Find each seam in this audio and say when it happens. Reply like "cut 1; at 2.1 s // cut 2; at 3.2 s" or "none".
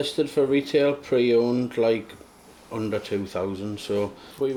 none